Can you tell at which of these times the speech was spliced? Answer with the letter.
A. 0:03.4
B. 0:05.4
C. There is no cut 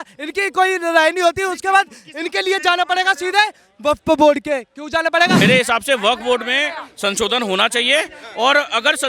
B